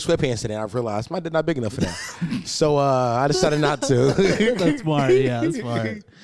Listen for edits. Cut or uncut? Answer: uncut